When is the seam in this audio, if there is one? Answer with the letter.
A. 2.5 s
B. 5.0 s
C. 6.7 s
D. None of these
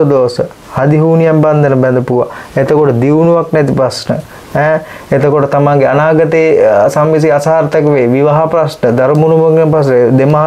D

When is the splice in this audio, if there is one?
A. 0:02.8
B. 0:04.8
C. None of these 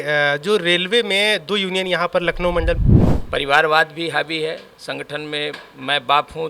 A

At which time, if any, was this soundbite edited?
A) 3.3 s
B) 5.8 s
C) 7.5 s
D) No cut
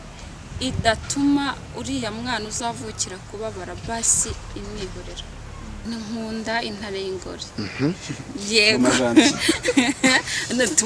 B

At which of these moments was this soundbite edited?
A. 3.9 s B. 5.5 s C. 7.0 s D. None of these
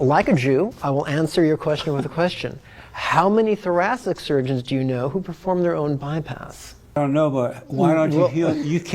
C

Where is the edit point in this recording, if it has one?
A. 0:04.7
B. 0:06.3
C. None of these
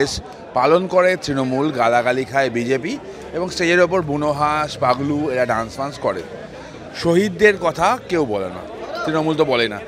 C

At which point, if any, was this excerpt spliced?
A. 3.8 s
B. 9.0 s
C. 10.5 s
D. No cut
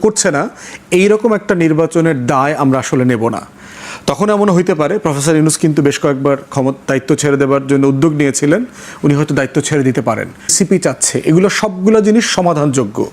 C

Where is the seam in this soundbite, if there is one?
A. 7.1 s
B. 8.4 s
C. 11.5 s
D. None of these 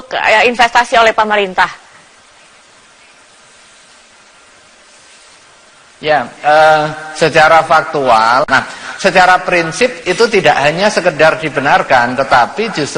B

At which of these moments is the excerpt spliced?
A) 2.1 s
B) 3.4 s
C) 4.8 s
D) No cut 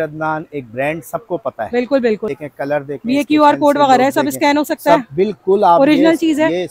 A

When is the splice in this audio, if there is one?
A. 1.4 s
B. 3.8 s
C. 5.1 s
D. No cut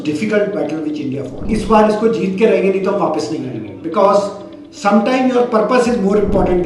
A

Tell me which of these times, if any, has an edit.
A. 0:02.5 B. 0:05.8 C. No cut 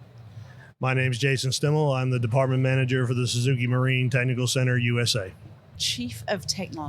B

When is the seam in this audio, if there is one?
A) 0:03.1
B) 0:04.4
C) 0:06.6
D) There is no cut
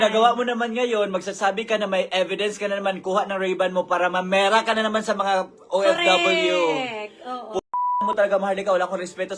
D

